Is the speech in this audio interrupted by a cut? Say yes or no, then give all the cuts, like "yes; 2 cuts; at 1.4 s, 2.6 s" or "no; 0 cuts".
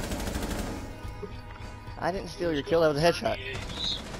no; 0 cuts